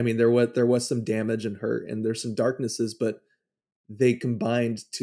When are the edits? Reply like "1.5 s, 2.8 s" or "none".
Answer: none